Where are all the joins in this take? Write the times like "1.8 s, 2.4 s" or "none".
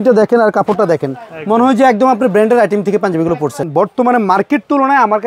3.6 s